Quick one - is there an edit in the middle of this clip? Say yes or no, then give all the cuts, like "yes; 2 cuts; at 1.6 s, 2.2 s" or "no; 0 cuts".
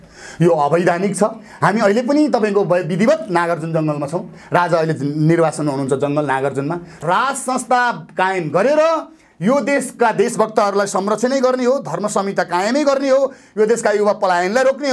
yes; 1 cut; at 6.9 s